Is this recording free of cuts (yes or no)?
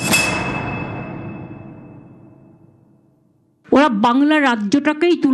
no